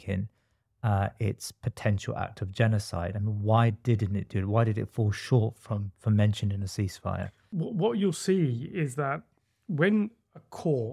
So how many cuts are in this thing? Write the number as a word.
zero